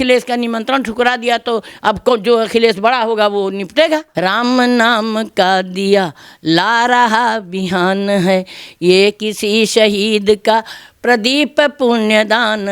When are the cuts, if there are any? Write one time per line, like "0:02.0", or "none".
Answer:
0:04.1

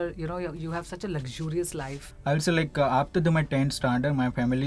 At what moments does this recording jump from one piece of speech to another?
0:02.0

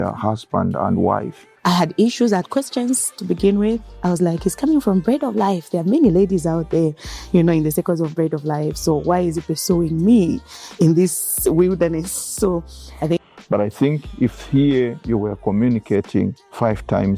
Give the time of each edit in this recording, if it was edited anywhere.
0:01.4
0:13.2

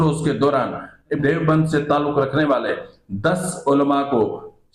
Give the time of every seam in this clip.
0:01.2

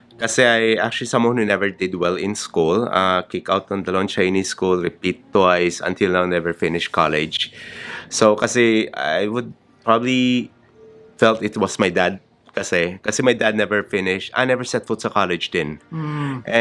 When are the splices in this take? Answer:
none

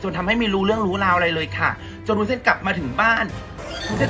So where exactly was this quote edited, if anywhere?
none

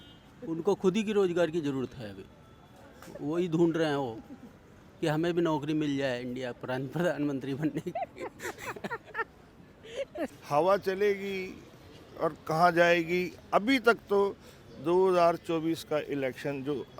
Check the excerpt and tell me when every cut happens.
0:10.4

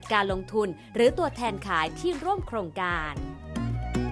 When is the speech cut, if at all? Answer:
0:03.0

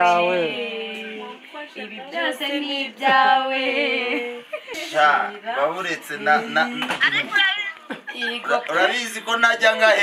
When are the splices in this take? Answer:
0:04.8

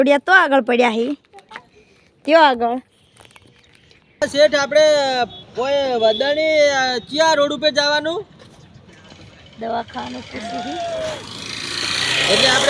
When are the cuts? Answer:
0:04.2

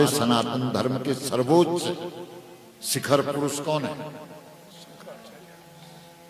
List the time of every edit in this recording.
none

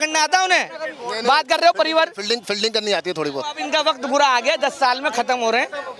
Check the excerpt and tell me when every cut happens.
0:03.6

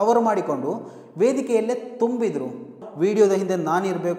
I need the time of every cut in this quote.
0:02.8

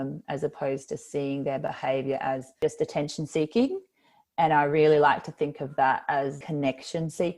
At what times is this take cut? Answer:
0:02.6
0:06.4

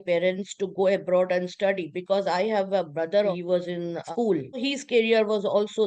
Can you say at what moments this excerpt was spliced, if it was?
0:03.3
0:04.6

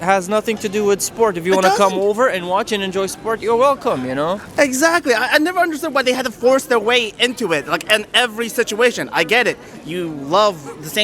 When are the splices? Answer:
none

